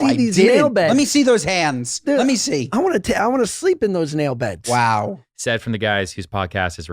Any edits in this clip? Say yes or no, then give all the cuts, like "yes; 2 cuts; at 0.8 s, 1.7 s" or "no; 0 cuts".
yes; 1 cut; at 5.2 s